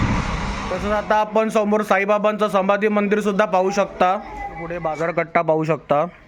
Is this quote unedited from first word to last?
no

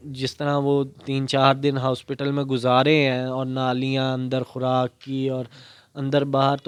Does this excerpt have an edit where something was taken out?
no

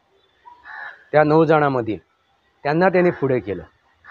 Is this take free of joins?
yes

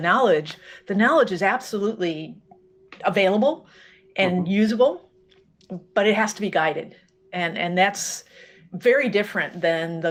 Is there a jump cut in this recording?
no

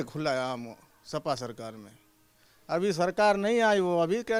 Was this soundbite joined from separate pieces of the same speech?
no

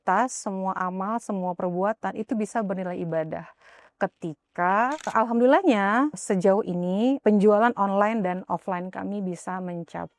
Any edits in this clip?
yes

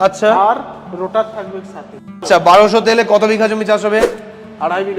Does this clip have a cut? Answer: yes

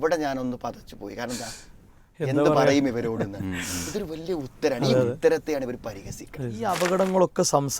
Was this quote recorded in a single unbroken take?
no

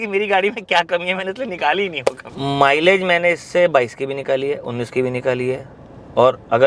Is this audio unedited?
no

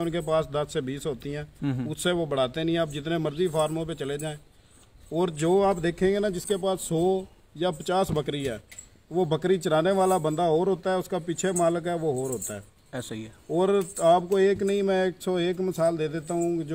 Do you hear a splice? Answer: no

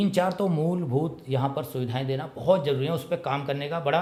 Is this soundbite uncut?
yes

